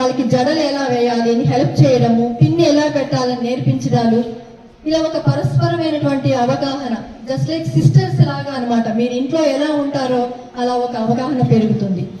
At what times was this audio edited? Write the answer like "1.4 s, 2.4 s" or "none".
none